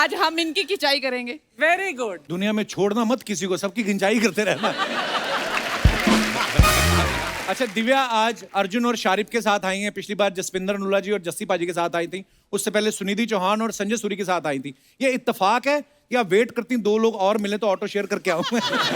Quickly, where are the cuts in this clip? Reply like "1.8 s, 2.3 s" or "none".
7.3 s